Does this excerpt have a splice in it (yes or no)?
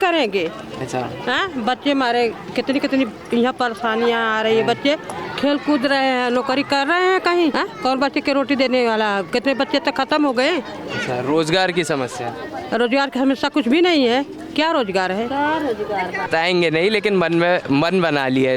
no